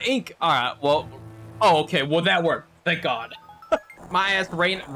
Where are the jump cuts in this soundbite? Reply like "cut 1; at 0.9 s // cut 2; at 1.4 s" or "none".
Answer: cut 1; at 3.9 s